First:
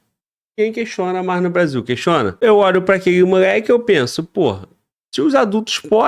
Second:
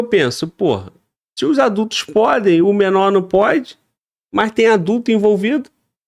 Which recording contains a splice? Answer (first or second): first